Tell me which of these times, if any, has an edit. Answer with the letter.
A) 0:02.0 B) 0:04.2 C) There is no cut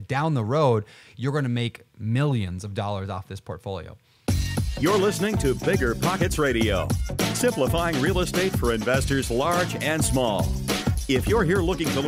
B